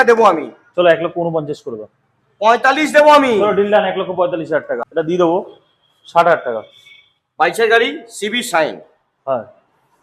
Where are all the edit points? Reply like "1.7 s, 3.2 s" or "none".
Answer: 4.8 s